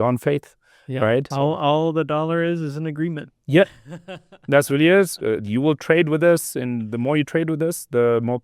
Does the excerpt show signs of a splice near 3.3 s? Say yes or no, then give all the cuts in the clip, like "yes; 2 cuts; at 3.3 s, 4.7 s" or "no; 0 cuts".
no; 1 cut; at 1.3 s